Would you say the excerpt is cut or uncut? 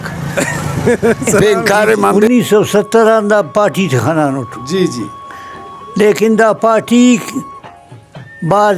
cut